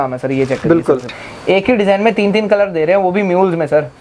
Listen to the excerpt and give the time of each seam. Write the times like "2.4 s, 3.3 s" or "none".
1.1 s